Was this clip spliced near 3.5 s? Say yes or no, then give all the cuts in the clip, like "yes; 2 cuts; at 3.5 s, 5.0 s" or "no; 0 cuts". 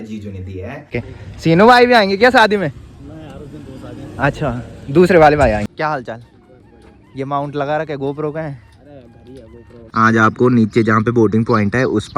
no; 3 cuts; at 0.9 s, 5.6 s, 9.9 s